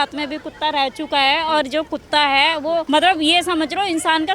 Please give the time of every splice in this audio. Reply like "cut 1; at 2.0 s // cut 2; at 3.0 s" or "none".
cut 1; at 2.9 s